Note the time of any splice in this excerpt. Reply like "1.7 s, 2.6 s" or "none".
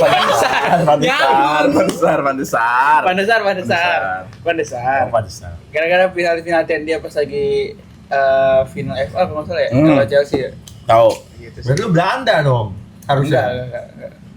none